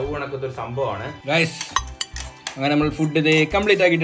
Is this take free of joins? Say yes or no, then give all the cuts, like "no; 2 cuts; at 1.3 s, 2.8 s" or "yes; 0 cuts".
no; 1 cut; at 1.1 s